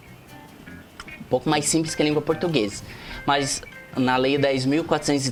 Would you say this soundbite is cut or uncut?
uncut